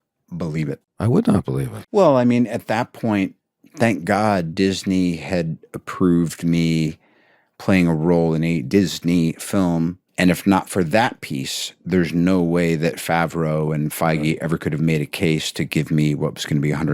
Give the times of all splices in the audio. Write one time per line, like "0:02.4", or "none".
0:00.9
0:01.7
0:10.0